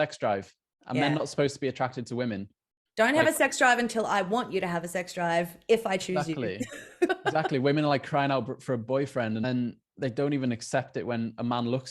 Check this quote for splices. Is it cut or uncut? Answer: cut